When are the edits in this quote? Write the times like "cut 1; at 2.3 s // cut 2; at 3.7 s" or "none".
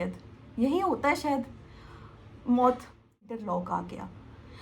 cut 1; at 3.4 s